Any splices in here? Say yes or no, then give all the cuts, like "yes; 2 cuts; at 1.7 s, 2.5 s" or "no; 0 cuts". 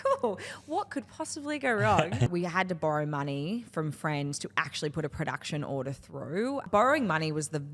yes; 2 cuts; at 2.3 s, 6.7 s